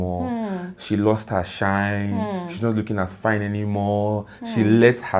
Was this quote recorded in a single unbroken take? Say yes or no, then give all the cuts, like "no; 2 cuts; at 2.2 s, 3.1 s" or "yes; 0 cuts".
yes; 0 cuts